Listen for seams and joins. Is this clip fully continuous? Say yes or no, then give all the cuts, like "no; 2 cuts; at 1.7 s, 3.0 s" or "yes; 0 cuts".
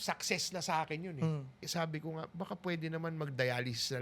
no; 1 cut; at 1.6 s